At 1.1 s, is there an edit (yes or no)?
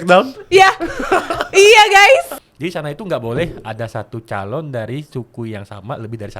no